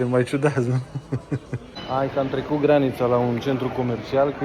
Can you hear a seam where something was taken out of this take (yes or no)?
yes